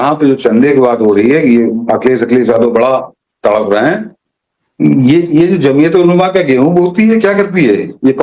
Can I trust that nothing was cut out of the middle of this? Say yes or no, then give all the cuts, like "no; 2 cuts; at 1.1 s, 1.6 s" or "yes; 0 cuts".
yes; 0 cuts